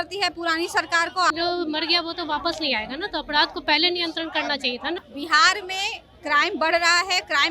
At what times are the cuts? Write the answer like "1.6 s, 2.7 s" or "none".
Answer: 1.3 s, 5.0 s